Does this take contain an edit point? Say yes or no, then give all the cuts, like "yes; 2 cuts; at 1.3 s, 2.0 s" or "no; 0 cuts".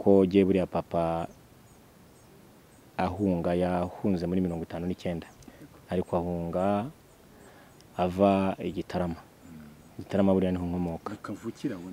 no; 0 cuts